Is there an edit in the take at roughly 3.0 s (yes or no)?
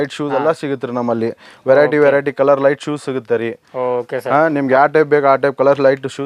no